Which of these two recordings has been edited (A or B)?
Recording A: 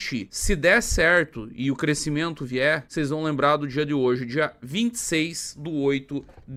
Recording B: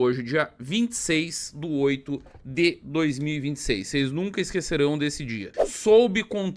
B